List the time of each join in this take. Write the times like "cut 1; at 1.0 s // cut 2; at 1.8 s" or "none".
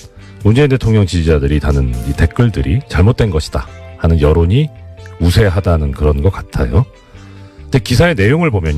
cut 1; at 3.8 s